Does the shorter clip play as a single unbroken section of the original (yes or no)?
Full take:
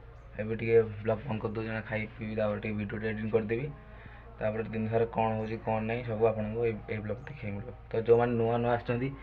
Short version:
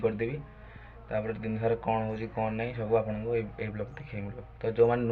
yes